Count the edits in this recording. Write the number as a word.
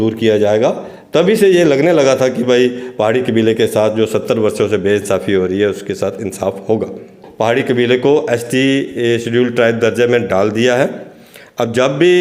one